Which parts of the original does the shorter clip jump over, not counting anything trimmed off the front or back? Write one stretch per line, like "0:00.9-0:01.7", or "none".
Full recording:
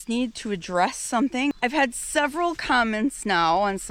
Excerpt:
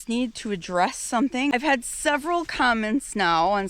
0:01.5-0:01.6